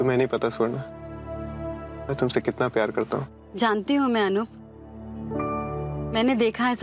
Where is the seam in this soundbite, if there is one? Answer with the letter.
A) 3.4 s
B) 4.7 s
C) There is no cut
A